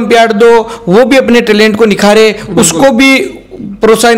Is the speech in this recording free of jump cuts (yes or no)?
yes